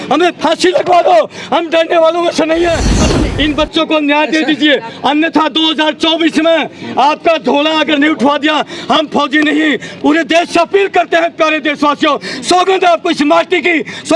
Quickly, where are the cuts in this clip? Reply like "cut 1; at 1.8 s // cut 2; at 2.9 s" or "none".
cut 1; at 3.0 s